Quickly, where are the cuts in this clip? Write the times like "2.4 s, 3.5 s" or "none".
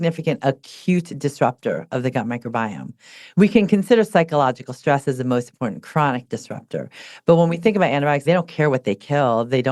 8.2 s

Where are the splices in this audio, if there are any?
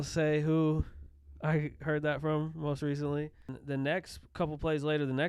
3.5 s

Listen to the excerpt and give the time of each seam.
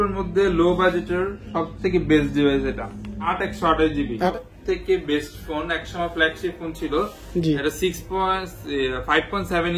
3.2 s, 4.3 s

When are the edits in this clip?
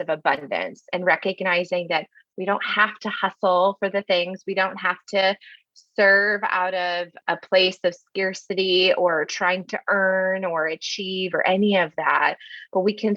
7.1 s

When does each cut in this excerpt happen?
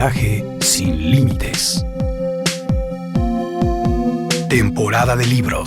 none

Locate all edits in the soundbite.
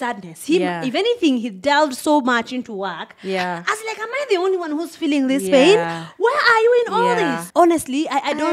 7.4 s

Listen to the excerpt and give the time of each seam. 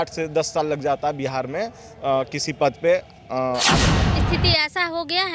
4.1 s

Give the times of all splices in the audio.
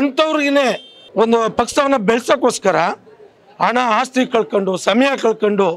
1.0 s

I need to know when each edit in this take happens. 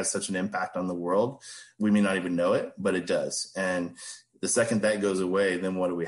none

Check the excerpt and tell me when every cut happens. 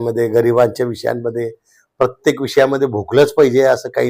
none

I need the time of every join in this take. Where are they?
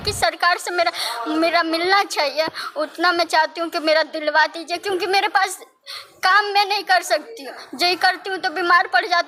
none

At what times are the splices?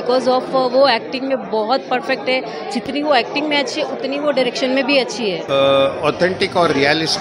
5.4 s

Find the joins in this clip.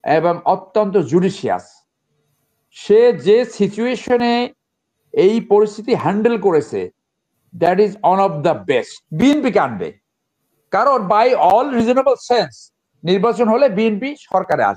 9.0 s

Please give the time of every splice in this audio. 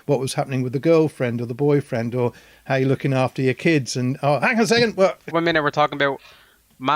5.2 s

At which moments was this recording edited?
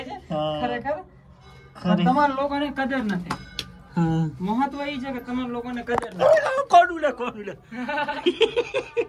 none

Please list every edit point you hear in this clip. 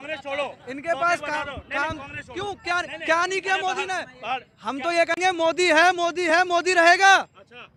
none

